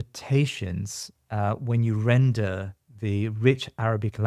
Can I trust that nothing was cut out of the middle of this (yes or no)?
yes